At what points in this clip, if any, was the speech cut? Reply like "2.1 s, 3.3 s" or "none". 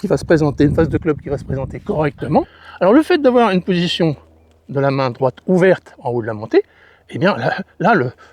2.6 s